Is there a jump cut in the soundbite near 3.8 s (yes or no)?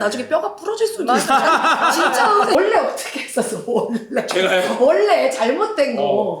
no